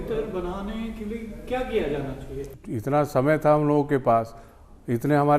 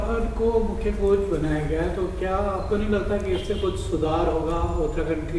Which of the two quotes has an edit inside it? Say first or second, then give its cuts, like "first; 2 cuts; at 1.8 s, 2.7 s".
first; 1 cut; at 2.6 s